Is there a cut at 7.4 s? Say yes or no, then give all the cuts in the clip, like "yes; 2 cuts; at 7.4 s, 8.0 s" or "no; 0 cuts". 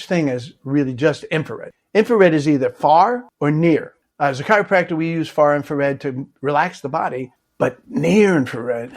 yes; 2 cuts; at 4.0 s, 7.4 s